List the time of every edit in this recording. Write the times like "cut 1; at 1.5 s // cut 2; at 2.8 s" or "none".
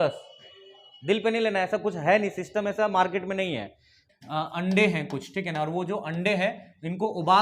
cut 1; at 4.0 s